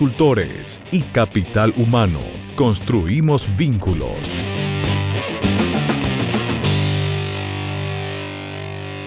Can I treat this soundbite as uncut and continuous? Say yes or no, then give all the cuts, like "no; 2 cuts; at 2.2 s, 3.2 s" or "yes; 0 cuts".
no; 1 cut; at 4.4 s